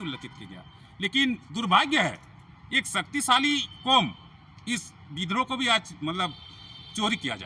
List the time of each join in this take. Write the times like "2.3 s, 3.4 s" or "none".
none

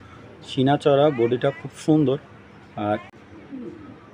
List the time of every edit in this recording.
3.0 s

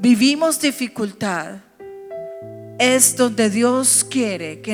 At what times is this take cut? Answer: none

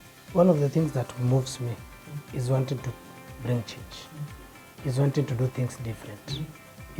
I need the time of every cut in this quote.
none

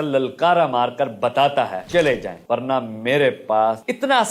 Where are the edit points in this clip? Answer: 1.8 s

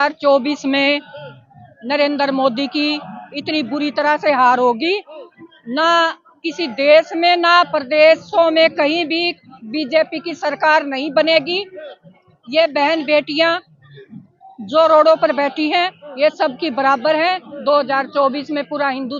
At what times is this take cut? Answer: none

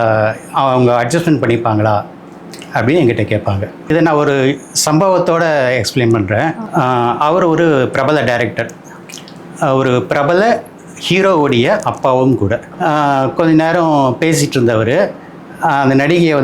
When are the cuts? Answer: 3.9 s, 12.6 s

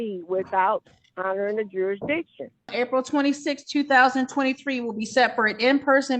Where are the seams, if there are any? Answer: 2.7 s

